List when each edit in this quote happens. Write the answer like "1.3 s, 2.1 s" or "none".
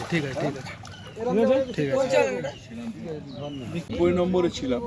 3.8 s